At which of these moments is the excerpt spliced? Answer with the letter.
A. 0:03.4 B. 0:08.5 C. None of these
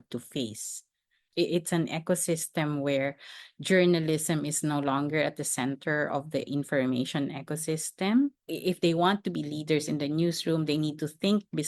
B